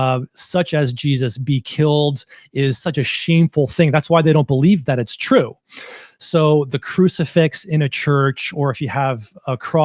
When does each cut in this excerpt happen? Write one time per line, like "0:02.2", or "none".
none